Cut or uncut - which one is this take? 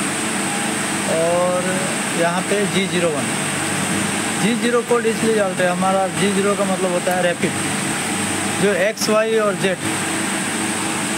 uncut